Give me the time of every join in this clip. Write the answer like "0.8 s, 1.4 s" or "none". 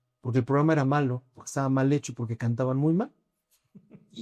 none